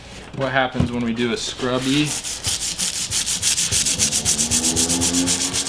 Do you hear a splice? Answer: no; 0 cuts

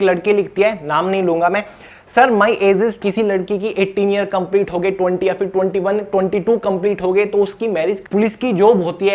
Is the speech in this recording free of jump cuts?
no; 2 cuts; at 3.0 s, 8.0 s

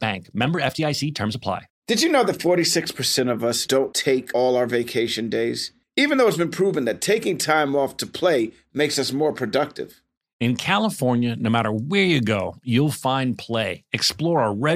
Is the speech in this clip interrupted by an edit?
yes; 1 cut; at 1.7 s

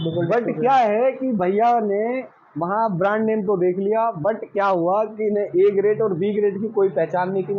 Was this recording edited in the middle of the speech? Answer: no; 0 cuts

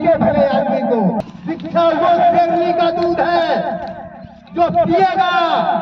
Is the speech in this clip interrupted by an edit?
yes; 1 cut; at 1.2 s

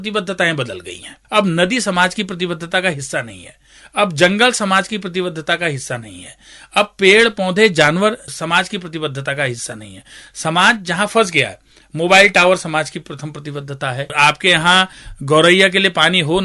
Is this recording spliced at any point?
yes; 1 cut; at 14.1 s

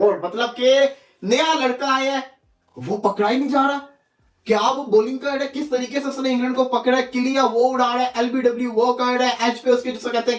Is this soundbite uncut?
yes; 0 cuts

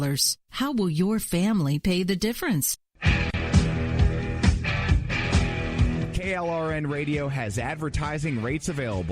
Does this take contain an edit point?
yes; 1 cut; at 3.0 s

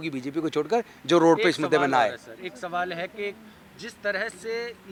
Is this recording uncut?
yes; 0 cuts

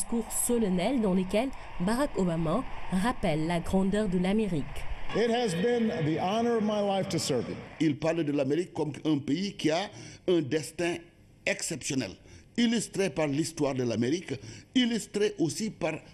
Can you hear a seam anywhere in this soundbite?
yes; 1 cut; at 6.9 s

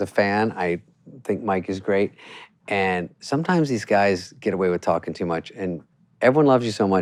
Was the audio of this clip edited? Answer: no; 0 cuts

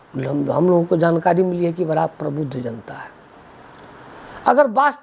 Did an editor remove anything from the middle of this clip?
no; 0 cuts

